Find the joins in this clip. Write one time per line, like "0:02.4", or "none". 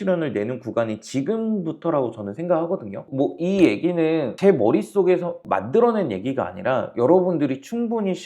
0:03.0